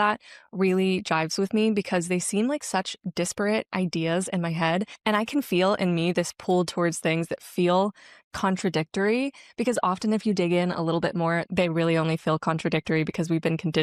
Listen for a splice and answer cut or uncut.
uncut